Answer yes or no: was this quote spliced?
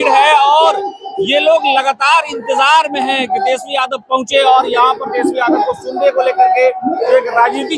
no